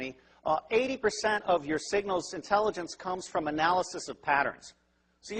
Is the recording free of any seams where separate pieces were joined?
yes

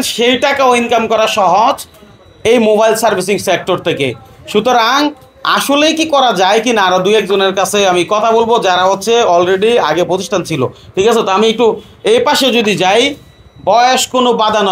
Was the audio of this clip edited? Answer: no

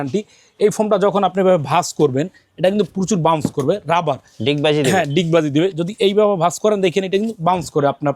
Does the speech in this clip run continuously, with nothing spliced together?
yes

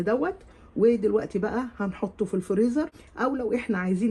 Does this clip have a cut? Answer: yes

